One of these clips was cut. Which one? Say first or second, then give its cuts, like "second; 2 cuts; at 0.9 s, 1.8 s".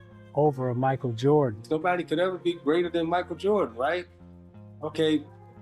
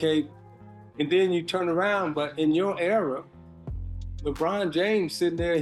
first; 1 cut; at 1.6 s